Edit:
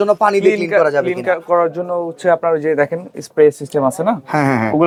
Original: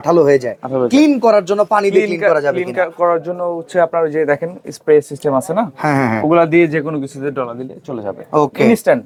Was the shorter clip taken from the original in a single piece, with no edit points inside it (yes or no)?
yes